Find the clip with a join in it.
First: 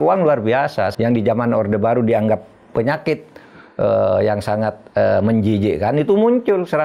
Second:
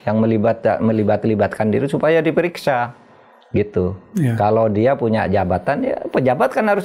first; 1 cut; at 0.9 s

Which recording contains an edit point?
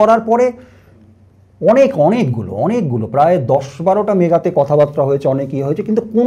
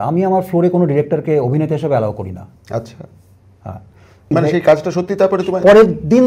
second; 1 cut; at 4.3 s

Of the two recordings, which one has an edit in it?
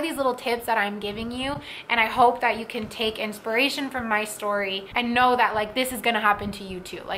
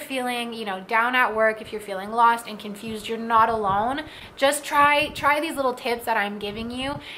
first; 1 cut; at 4.8 s

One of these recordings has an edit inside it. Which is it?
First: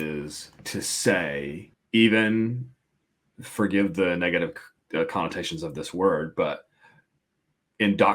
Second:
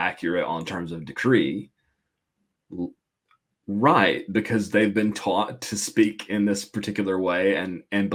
first; 1 cut; at 1.7 s

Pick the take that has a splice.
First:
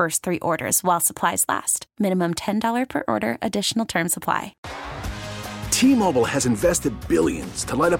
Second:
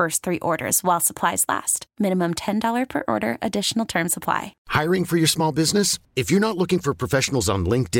first; 1 cut; at 4.6 s

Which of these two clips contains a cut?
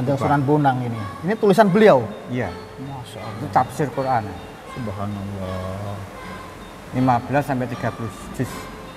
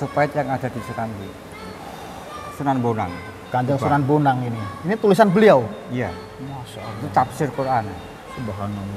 second; 1 cut; at 2.4 s

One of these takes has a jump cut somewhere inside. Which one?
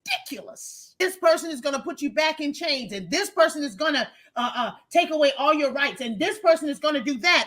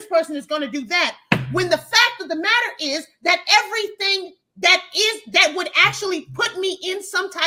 first; 1 cut; at 1.0 s

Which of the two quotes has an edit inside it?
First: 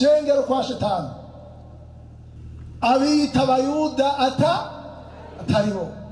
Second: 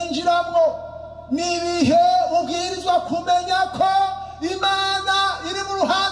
first; 1 cut; at 2.4 s

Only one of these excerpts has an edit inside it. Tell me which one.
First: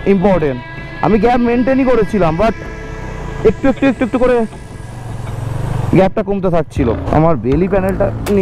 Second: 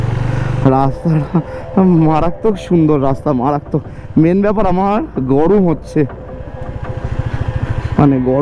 first; 1 cut; at 7.0 s

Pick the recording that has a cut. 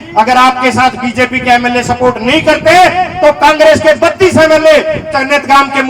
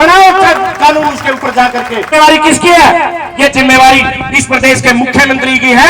second; 1 cut; at 2.1 s

